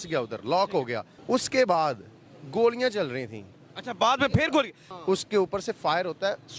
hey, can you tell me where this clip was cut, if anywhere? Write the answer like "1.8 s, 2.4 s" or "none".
1.1 s, 4.8 s